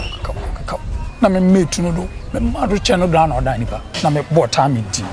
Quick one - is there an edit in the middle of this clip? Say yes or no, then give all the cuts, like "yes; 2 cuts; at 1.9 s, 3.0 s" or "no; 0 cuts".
yes; 1 cut; at 3.8 s